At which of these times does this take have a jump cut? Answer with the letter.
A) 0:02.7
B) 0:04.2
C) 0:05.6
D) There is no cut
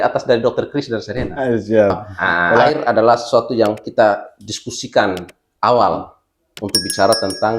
A